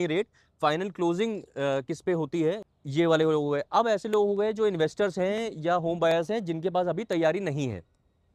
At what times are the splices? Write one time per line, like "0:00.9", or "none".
0:02.6